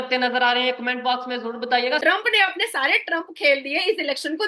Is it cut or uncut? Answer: cut